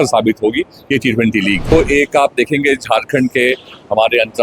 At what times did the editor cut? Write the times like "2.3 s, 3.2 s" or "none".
1.7 s